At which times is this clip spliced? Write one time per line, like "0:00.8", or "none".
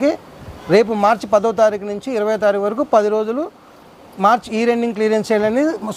none